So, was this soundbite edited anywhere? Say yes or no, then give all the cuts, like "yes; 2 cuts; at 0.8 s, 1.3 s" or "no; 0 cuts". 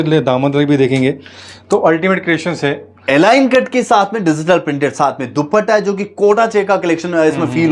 no; 0 cuts